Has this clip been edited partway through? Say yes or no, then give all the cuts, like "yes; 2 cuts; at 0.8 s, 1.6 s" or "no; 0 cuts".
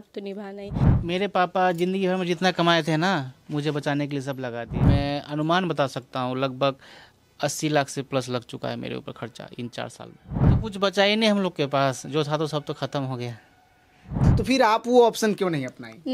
yes; 4 cuts; at 1.0 s, 4.9 s, 10.5 s, 14.2 s